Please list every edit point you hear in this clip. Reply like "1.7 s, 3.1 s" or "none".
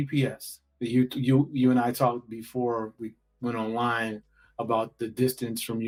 none